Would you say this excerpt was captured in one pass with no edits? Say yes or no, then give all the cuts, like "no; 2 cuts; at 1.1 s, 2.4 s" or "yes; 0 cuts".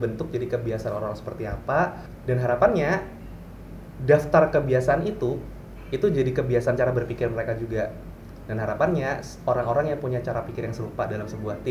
no; 1 cut; at 2.1 s